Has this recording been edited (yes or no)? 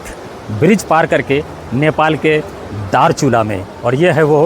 no